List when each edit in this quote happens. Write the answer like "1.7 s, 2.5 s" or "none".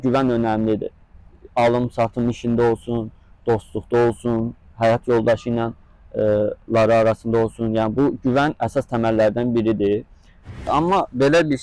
10.6 s